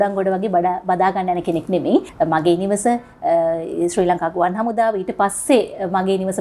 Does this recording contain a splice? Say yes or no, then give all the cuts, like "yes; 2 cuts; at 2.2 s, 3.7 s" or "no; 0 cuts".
yes; 1 cut; at 2.1 s